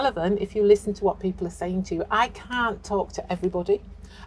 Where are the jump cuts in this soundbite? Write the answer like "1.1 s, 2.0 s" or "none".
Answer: none